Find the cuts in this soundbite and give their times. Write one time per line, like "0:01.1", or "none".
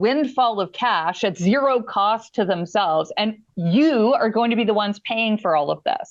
none

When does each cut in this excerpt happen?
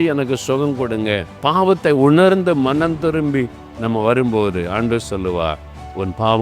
0:01.4

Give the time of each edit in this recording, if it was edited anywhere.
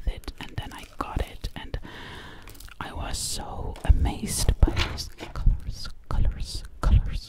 none

